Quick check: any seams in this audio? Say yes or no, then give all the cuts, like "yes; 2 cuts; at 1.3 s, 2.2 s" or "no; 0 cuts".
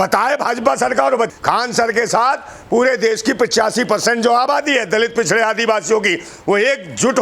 yes; 1 cut; at 1.3 s